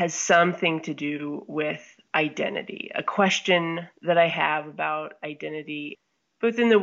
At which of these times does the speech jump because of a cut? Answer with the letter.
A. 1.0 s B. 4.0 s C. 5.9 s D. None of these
C